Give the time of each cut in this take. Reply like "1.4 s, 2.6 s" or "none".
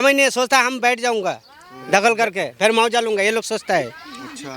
none